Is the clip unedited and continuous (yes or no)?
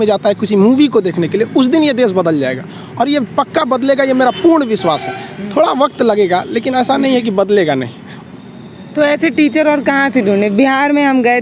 yes